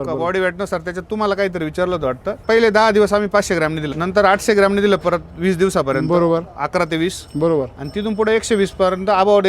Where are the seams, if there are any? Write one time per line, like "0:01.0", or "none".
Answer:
0:02.4
0:03.9